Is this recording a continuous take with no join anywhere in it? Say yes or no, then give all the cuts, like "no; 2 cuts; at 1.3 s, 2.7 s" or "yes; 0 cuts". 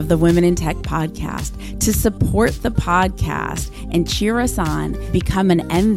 yes; 0 cuts